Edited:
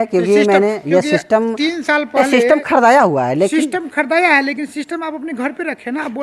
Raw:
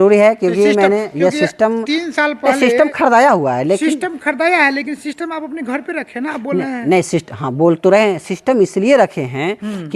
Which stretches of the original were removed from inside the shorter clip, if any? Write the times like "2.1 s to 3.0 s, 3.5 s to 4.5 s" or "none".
none